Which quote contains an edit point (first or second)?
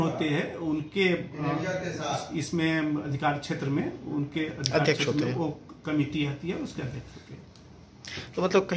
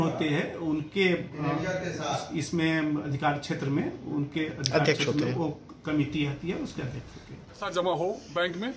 second